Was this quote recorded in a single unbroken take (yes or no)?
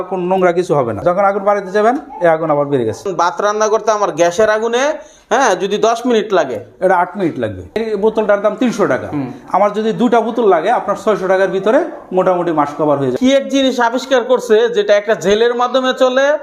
no